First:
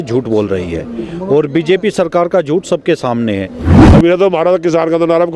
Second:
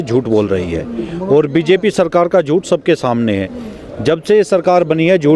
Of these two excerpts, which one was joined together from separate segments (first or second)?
first